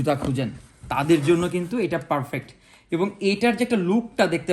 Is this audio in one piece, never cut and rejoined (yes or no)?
yes